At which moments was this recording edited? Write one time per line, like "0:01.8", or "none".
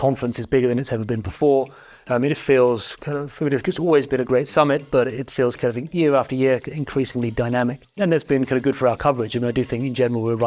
none